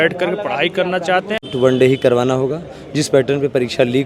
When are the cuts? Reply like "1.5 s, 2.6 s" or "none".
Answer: 1.4 s